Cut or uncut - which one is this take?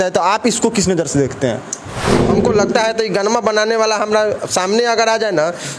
cut